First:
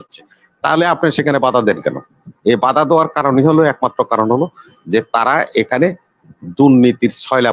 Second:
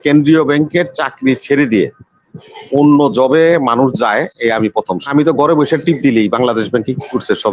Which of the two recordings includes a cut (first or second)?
second